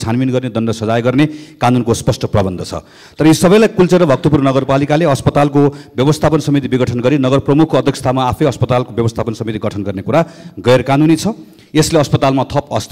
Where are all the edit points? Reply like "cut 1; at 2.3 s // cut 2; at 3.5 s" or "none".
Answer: none